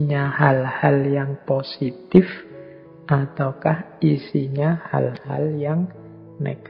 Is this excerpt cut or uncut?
uncut